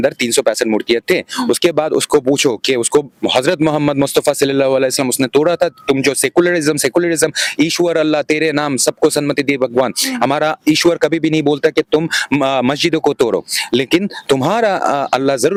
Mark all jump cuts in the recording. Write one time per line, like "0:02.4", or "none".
none

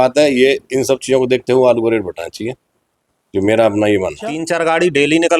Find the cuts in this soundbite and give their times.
0:04.4

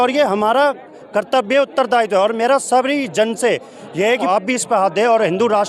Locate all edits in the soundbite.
0:04.2

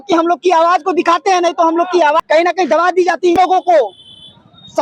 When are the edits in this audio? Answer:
0:02.2
0:03.4

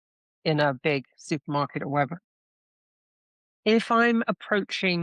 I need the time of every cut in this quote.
none

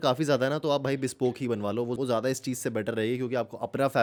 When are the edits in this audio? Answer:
none

